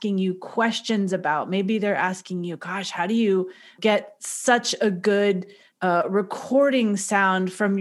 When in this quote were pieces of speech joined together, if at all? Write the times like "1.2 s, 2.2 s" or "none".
3.8 s